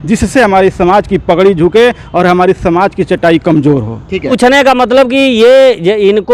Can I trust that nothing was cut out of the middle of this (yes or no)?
no